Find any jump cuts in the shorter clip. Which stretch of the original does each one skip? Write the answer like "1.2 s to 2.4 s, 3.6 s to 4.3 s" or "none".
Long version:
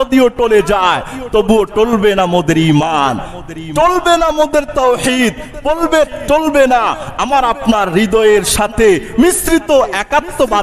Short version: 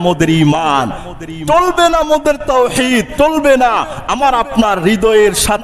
5.4 s to 6.2 s